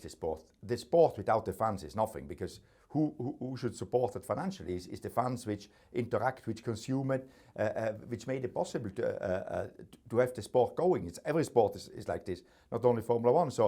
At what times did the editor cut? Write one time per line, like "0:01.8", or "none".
none